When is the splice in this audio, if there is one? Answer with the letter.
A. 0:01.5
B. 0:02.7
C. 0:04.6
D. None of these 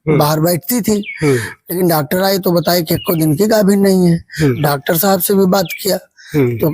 C